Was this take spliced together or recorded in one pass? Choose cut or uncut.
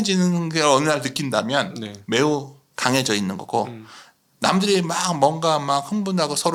uncut